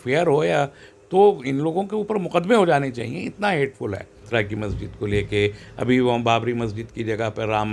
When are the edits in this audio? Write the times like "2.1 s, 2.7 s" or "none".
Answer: 4.2 s